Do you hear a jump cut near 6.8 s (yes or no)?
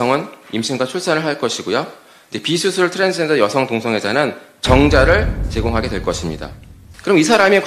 yes